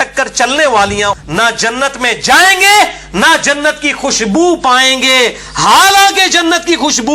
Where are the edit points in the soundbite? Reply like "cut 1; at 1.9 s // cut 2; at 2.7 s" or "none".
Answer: cut 1; at 1.1 s